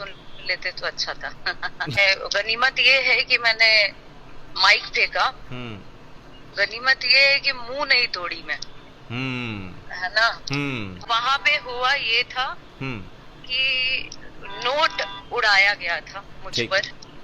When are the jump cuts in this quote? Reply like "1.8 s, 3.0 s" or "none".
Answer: 2.0 s, 11.0 s